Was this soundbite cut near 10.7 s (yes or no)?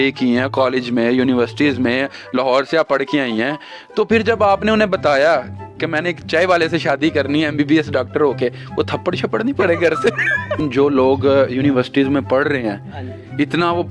yes